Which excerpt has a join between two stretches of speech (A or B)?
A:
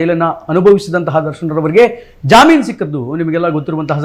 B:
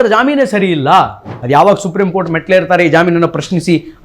B